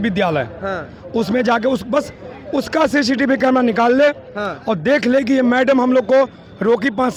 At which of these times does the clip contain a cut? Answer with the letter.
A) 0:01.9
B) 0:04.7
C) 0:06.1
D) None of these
D